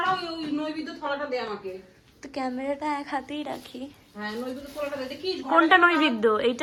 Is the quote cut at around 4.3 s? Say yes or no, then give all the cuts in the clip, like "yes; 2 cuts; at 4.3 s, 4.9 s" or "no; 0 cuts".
no; 0 cuts